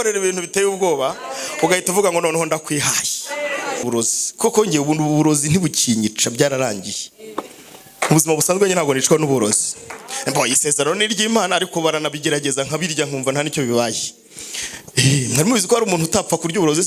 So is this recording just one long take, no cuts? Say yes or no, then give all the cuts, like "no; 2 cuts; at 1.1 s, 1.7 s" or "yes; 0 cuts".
no; 1 cut; at 3.8 s